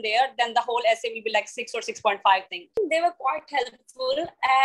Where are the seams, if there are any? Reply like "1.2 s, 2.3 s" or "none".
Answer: 2.8 s